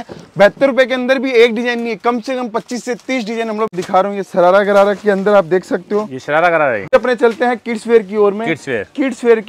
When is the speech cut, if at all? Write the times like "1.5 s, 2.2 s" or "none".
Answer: 3.8 s, 6.8 s